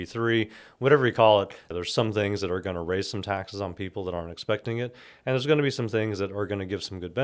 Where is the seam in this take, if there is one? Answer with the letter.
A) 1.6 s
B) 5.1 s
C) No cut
A